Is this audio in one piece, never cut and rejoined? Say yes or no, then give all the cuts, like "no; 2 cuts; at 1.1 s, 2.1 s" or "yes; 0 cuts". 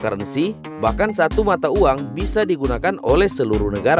yes; 0 cuts